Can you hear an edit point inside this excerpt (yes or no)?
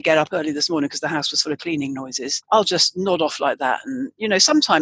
yes